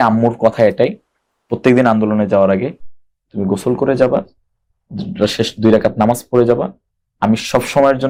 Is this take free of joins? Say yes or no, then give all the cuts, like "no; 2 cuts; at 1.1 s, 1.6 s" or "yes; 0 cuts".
yes; 0 cuts